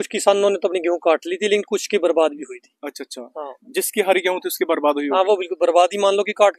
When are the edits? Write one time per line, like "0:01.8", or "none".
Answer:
none